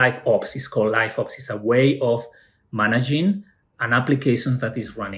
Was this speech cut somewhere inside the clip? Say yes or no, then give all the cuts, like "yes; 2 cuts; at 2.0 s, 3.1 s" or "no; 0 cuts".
no; 0 cuts